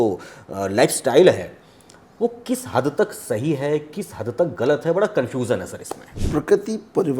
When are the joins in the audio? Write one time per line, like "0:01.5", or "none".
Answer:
0:06.2